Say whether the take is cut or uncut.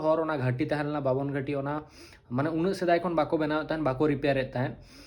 uncut